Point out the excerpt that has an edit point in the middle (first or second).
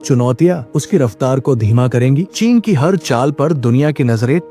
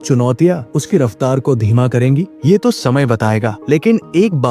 first